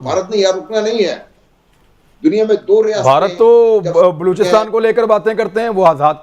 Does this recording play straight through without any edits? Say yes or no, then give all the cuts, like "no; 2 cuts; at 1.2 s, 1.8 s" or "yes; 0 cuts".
yes; 0 cuts